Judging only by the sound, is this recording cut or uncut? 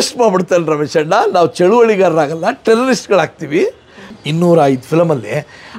cut